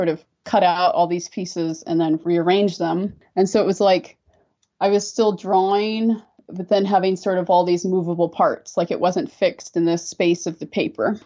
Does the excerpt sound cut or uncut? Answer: uncut